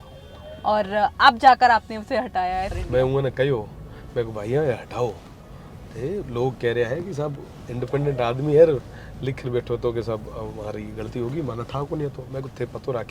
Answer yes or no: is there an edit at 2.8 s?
yes